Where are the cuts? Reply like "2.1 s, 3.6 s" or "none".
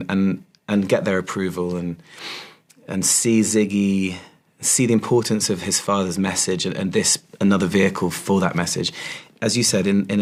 none